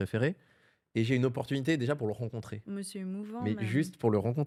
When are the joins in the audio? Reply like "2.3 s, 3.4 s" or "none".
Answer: none